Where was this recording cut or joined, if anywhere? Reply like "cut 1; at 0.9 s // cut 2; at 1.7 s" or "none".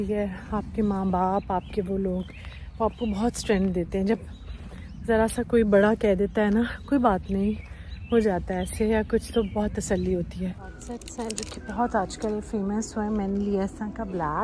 cut 1; at 10.7 s

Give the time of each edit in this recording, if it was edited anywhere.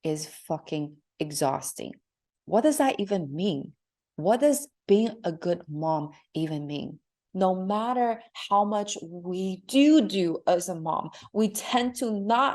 cut 1; at 7.2 s

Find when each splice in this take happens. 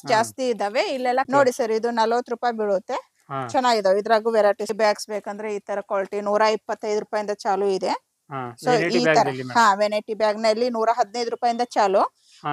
cut 1; at 1.3 s // cut 2; at 4.7 s

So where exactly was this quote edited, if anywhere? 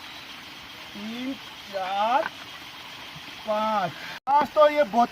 cut 1; at 4.1 s

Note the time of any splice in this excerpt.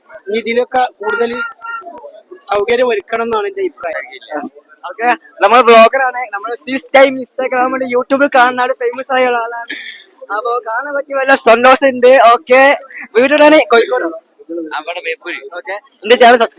cut 1; at 3.9 s

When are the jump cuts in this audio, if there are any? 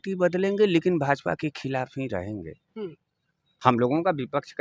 none

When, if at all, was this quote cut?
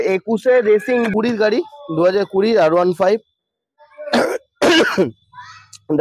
cut 1; at 1.1 s

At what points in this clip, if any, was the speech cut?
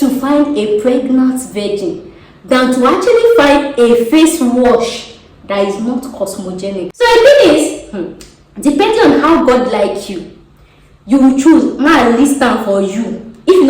cut 1; at 6.9 s

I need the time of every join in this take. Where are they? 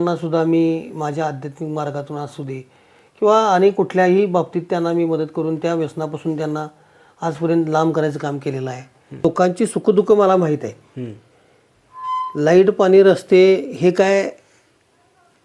cut 1; at 9.2 s

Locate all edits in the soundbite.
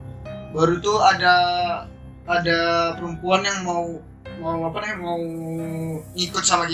none

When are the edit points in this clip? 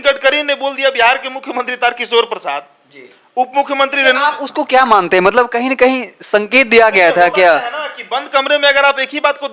none

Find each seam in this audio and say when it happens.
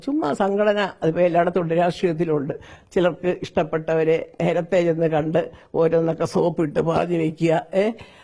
none

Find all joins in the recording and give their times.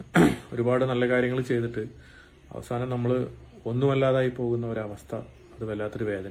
none

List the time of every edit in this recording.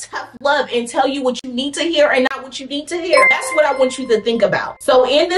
none

